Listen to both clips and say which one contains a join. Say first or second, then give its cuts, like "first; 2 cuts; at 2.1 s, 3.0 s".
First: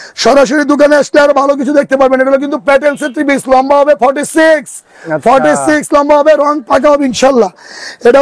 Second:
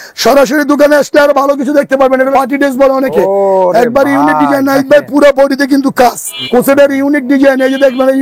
second; 2 cuts; at 2.3 s, 6.3 s